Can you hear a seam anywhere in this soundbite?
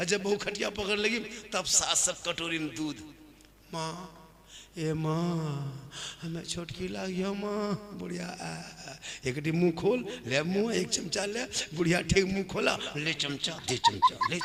no; 0 cuts

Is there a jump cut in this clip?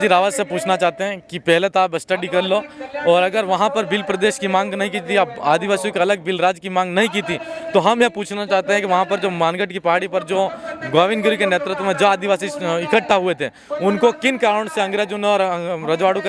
no; 0 cuts

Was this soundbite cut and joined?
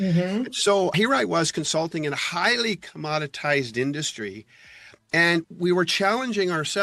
no; 0 cuts

